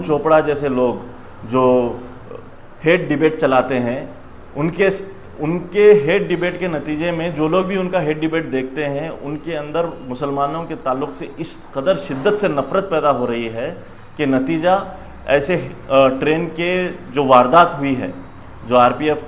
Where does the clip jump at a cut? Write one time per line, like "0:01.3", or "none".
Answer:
none